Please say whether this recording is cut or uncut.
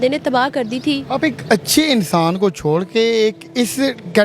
uncut